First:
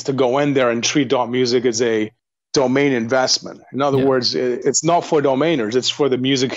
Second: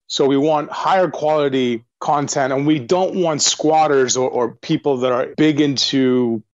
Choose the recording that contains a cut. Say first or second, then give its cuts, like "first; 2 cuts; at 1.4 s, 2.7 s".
second; 3 cuts; at 1.9 s, 2.8 s, 5.3 s